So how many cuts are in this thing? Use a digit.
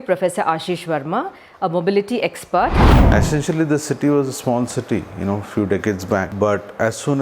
2